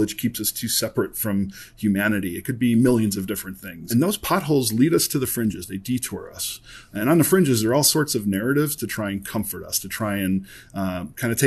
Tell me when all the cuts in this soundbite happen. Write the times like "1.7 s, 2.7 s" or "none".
3.8 s